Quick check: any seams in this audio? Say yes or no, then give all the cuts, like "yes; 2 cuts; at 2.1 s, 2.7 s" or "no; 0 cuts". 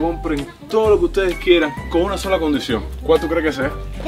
yes; 1 cut; at 2.9 s